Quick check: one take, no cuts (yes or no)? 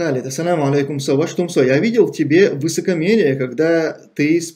yes